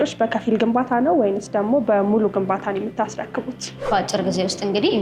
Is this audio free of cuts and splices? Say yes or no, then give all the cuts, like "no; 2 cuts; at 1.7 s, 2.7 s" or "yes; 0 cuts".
no; 1 cut; at 3.7 s